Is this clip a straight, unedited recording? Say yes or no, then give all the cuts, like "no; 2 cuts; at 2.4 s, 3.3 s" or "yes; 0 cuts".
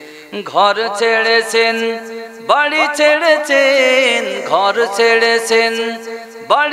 yes; 0 cuts